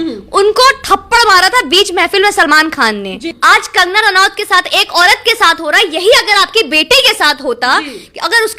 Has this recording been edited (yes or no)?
yes